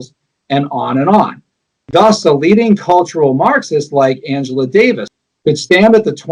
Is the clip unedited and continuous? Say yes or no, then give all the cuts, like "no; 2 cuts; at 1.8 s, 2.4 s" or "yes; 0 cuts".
no; 1 cut; at 5.1 s